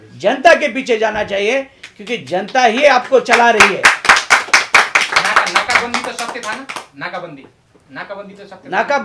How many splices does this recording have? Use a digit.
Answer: 0